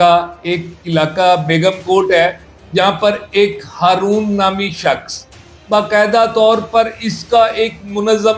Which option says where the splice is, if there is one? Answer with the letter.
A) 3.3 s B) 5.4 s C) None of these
B